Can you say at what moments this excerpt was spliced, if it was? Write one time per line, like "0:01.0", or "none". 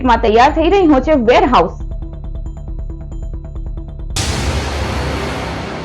0:03.9

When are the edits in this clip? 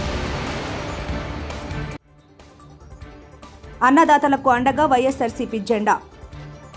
0:03.7

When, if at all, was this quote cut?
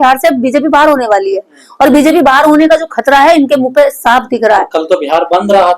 none

